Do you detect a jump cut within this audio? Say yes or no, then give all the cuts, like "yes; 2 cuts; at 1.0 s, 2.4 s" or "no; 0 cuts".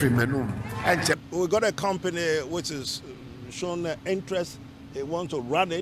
yes; 1 cut; at 1.2 s